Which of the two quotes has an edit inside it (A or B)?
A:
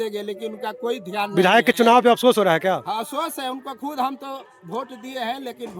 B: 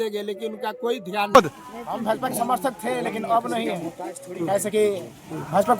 B